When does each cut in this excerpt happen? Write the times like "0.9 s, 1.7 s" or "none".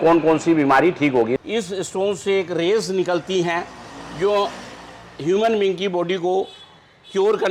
1.4 s

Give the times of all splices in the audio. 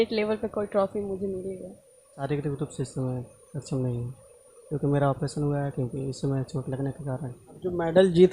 2.2 s, 7.4 s

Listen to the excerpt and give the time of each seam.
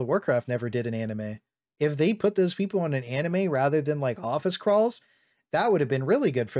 none

